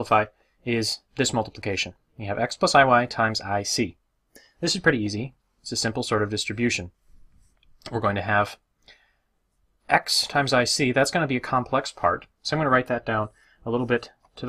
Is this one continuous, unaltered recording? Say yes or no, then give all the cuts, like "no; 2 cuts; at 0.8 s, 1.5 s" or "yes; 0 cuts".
no; 1 cut; at 5.9 s